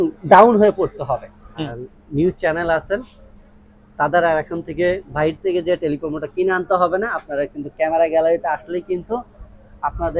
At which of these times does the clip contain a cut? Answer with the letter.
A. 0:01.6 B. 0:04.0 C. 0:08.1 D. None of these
A